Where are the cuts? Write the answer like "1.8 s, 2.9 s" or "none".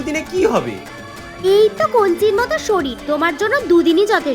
none